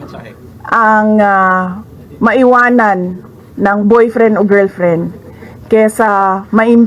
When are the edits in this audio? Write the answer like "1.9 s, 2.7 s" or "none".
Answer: none